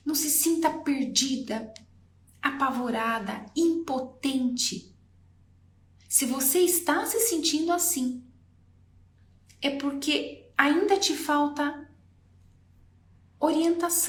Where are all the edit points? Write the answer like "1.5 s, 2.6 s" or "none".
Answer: none